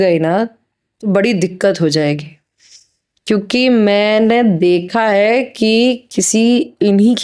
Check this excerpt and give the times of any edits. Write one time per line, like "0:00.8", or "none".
none

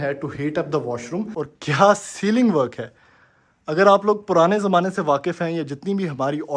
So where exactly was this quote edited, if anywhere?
0:01.3

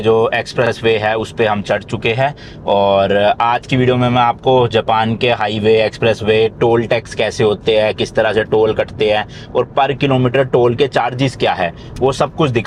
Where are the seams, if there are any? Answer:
none

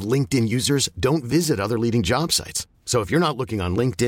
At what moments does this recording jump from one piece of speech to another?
none

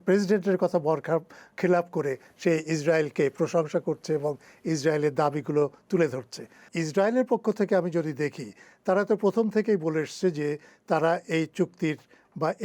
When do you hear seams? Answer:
0:06.7

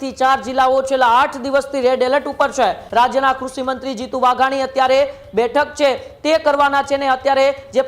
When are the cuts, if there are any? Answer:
0:02.8

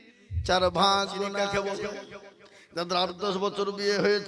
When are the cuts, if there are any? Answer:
0:01.4

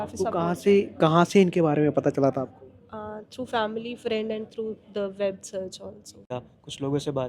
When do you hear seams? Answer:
0:06.3

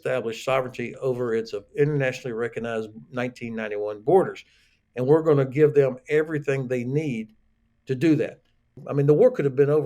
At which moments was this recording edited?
0:08.8

